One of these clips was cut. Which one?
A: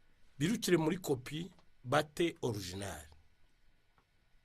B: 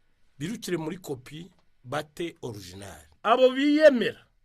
B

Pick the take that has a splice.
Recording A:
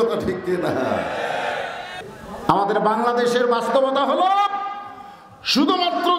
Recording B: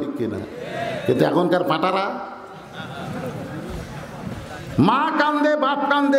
A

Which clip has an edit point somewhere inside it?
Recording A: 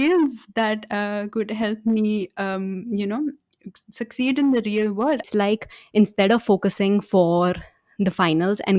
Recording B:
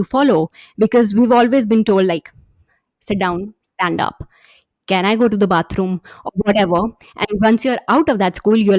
A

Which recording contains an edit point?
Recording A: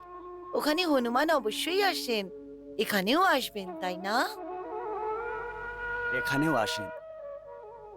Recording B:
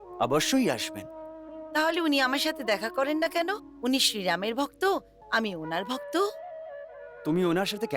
A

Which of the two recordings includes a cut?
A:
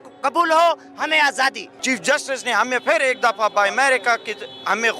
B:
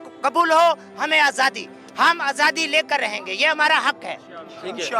A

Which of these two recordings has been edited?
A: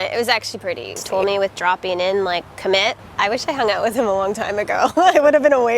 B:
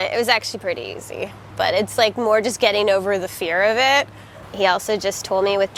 A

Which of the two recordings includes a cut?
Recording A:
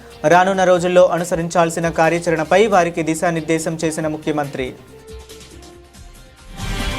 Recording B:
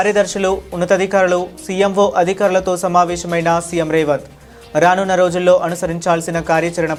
A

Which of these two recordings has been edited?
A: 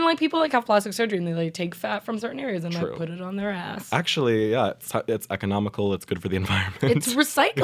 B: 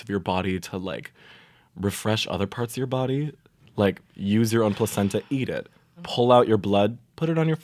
B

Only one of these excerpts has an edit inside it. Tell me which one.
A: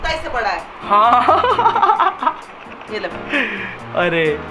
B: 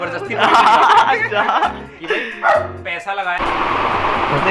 B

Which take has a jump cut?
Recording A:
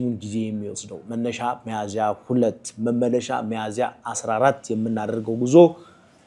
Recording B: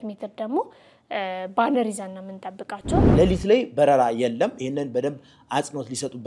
B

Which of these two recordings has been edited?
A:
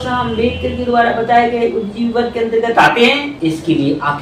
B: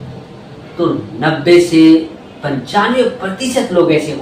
A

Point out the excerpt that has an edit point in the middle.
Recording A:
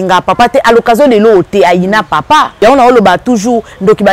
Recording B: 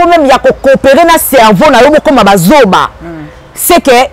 A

